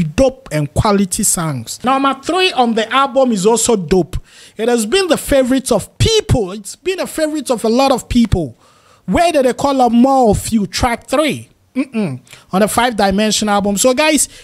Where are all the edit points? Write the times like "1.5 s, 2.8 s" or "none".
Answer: 1.7 s